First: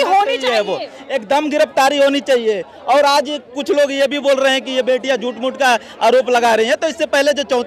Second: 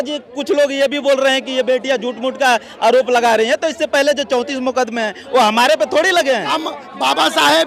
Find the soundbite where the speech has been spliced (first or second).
second